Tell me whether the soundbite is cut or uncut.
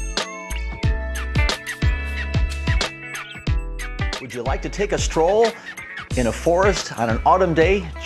uncut